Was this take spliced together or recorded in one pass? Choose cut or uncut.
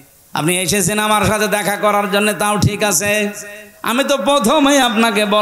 uncut